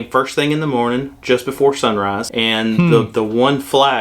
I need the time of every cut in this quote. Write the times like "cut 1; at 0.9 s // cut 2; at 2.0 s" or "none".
cut 1; at 2.2 s